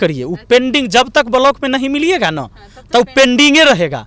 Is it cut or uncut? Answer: uncut